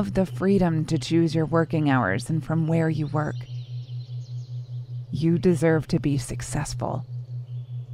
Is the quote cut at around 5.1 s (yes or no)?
yes